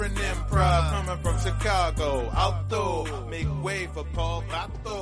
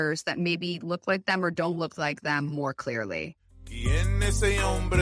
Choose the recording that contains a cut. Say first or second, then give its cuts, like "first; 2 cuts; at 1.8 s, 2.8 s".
second; 1 cut; at 3.7 s